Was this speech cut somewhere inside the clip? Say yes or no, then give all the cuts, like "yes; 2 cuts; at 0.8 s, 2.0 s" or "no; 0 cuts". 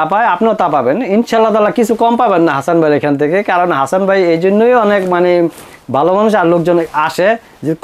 no; 0 cuts